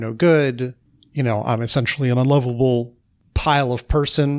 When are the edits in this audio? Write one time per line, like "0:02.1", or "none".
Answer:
none